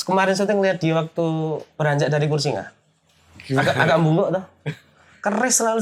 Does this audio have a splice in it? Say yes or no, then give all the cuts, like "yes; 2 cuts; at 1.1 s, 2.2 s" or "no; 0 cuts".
no; 0 cuts